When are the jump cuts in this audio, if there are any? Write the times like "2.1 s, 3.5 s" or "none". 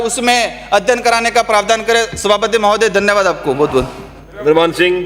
none